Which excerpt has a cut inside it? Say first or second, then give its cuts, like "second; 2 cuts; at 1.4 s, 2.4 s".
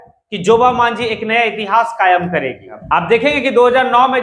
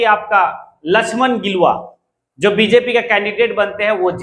first; 1 cut; at 2.7 s